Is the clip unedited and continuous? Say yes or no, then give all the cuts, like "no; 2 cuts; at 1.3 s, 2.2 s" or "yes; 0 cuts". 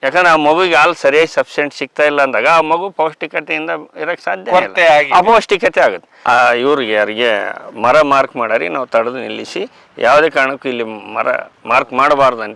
no; 2 cuts; at 6.1 s, 11.5 s